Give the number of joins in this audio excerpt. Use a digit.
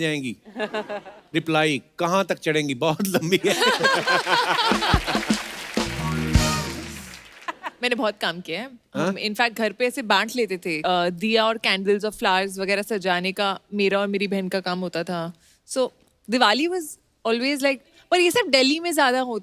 2